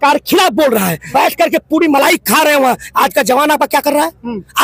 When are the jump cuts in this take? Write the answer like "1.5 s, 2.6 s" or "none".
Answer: 1.0 s